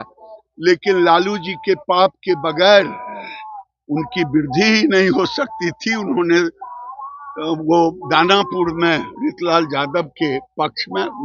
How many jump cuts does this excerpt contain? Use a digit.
0